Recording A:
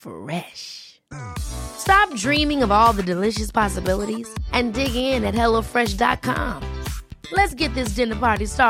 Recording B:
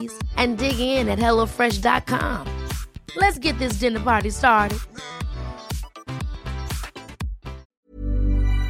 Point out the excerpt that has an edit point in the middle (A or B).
B